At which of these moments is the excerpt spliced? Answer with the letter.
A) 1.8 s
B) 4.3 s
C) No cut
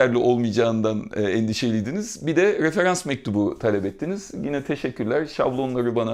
C